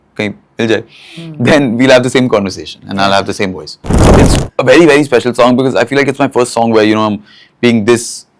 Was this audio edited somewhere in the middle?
yes; 1 cut; at 4.0 s

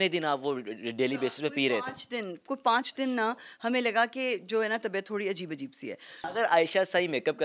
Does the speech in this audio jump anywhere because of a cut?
yes; 1 cut; at 6.1 s

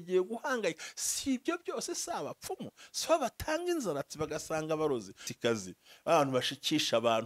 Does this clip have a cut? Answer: yes; 1 cut; at 5.2 s

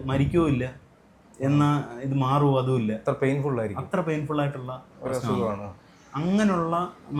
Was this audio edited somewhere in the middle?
no; 0 cuts

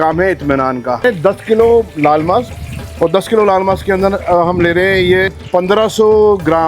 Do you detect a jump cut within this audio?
yes; 2 cuts; at 1.0 s, 5.4 s

